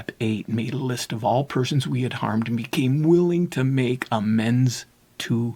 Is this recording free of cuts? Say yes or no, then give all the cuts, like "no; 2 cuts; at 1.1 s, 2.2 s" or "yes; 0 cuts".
yes; 0 cuts